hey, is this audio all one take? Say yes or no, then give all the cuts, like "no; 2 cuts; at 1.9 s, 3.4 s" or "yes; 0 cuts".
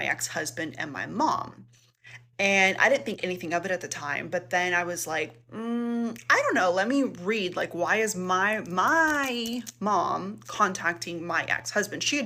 yes; 0 cuts